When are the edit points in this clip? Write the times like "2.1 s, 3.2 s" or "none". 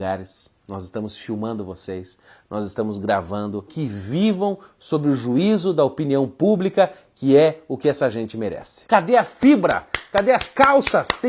3.7 s, 8.9 s